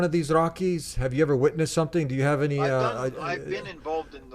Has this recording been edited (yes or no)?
yes